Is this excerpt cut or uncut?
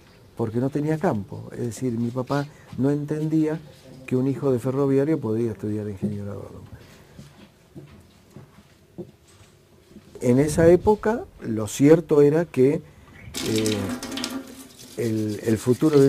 cut